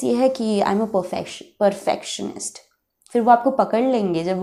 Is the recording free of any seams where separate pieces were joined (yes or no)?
yes